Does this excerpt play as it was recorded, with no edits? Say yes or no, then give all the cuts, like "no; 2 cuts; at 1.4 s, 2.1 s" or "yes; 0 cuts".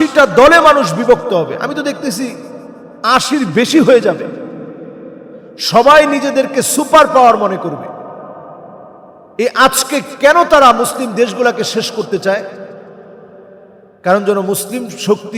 yes; 0 cuts